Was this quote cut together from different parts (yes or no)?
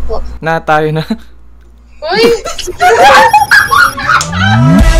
no